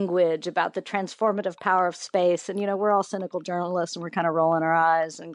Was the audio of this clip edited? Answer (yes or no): no